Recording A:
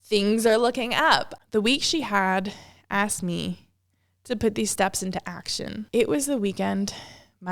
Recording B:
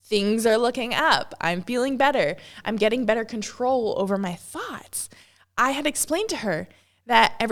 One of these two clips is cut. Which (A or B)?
A